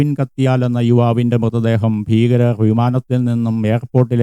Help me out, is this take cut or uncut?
uncut